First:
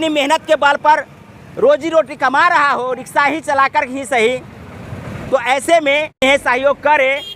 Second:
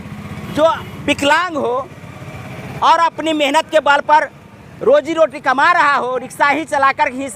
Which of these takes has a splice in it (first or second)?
first